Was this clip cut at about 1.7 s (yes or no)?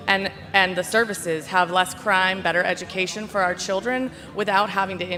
no